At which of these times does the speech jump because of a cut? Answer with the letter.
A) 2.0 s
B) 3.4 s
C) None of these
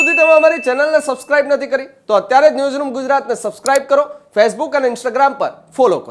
C